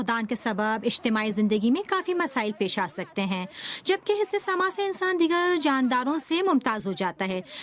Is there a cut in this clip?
yes; 1 cut; at 6.0 s

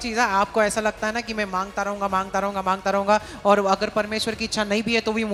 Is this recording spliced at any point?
no; 0 cuts

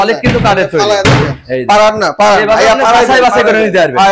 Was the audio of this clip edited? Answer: no; 0 cuts

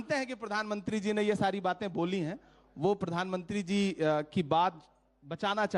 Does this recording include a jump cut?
no; 0 cuts

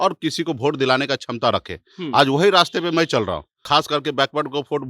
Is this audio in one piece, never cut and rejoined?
no; 1 cut; at 3.5 s

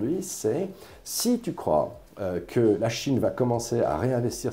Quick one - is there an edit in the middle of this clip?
yes; 1 cut; at 2.8 s

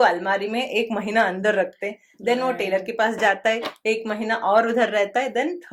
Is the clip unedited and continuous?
yes; 0 cuts

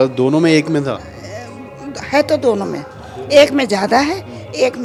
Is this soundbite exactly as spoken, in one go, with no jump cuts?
yes; 0 cuts

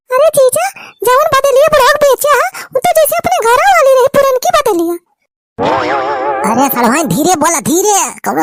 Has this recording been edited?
no; 0 cuts

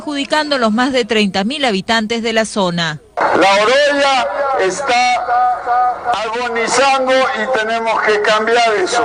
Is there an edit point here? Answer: no; 0 cuts

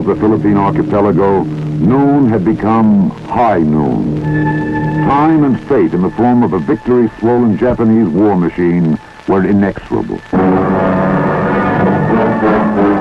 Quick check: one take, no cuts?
yes; 0 cuts

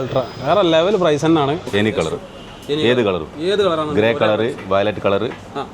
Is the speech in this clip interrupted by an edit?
yes; 1 cut; at 1.7 s

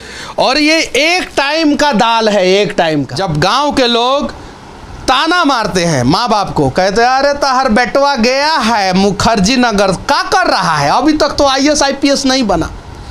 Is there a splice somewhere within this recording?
yes; 1 cut; at 3.1 s

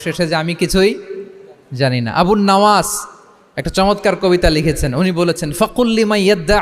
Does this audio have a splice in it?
no; 0 cuts

